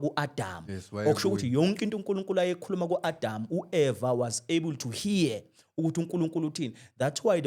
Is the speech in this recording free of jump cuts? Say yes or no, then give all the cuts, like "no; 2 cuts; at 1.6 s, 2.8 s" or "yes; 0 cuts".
yes; 0 cuts